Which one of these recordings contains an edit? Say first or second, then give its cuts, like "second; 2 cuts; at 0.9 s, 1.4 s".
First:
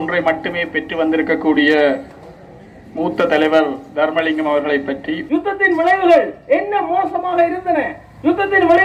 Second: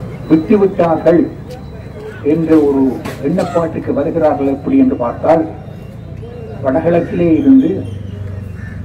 first; 1 cut; at 5.1 s